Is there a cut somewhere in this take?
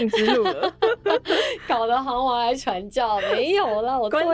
no; 0 cuts

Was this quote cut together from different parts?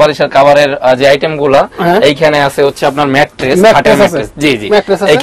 no; 0 cuts

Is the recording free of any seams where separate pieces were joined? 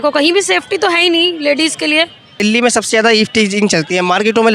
no; 1 cut; at 2.4 s

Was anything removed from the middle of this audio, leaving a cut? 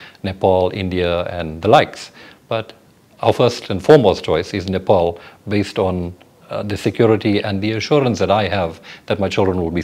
no; 0 cuts

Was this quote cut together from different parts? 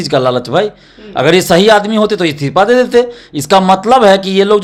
no; 0 cuts

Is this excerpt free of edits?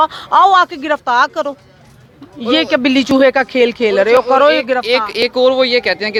yes; 0 cuts

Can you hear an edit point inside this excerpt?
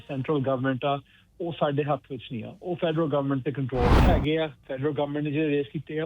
yes; 1 cut; at 4.0 s

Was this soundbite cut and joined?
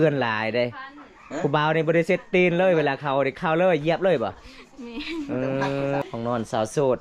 yes; 1 cut; at 6.0 s

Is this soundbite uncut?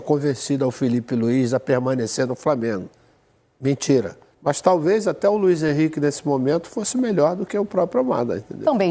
no; 1 cut; at 4.2 s

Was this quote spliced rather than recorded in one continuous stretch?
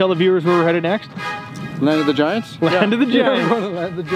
no; 0 cuts

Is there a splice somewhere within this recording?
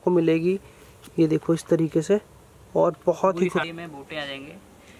yes; 1 cut; at 3.6 s

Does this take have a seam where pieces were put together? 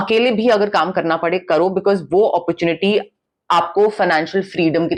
no; 0 cuts

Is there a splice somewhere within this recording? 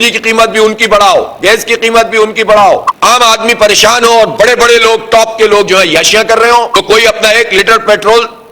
yes; 2 cuts; at 2.9 s, 6.7 s

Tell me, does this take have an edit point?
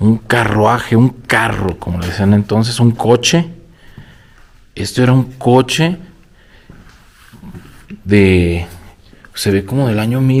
no; 0 cuts

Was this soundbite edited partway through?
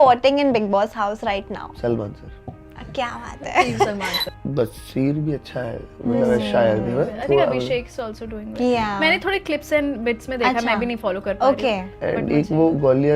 yes; 1 cut; at 4.2 s

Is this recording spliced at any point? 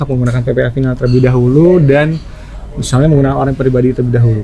no; 0 cuts

